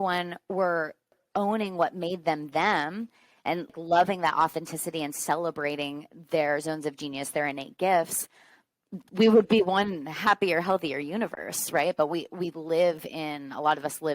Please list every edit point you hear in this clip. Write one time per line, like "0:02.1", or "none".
0:01.2
0:03.7